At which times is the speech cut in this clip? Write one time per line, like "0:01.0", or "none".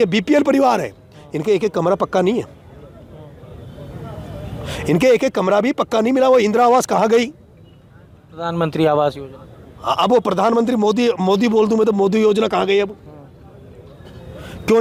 none